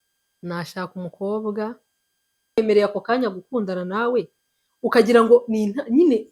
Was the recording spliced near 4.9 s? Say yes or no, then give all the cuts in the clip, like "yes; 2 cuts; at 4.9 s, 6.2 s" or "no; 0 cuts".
no; 1 cut; at 2.6 s